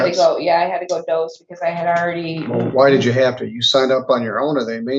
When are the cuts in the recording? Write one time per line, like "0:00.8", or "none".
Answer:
none